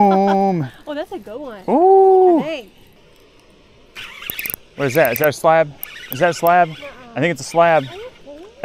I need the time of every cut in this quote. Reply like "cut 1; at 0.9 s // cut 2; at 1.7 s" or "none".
cut 1; at 3.0 s